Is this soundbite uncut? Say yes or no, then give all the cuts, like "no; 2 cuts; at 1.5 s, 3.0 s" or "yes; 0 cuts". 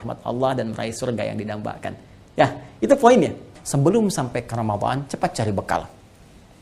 no; 1 cut; at 3.6 s